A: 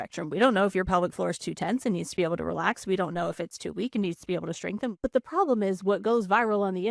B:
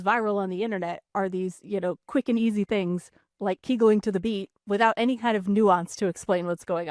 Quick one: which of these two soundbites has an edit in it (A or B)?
A